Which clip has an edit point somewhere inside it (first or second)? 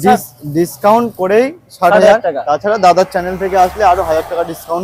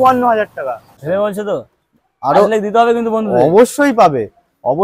second